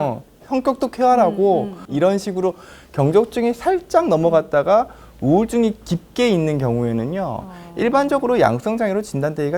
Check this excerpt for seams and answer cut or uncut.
cut